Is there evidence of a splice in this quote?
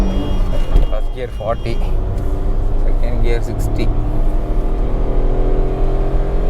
no; 0 cuts

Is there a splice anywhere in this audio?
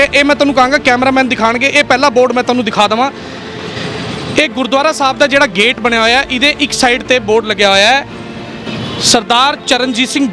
no; 0 cuts

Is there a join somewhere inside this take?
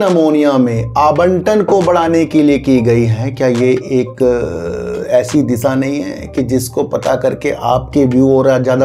no; 0 cuts

